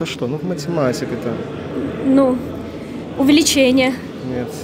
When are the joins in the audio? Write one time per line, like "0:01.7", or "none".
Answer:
none